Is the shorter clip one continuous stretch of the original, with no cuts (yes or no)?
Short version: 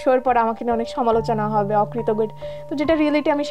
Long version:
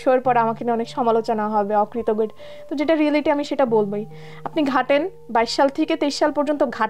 yes